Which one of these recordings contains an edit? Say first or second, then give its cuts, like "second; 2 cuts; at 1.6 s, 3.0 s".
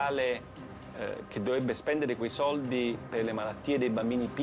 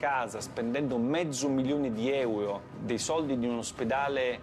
second; 1 cut; at 2.7 s